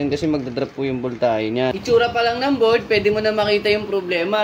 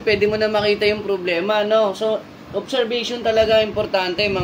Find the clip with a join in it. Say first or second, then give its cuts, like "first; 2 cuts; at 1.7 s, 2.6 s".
first; 1 cut; at 1.7 s